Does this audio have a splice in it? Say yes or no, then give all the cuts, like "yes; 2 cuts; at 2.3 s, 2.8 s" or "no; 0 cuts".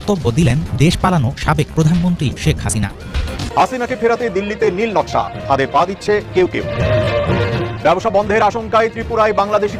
yes; 1 cut; at 3.0 s